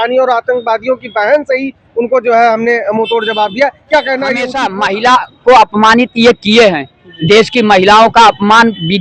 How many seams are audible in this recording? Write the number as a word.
one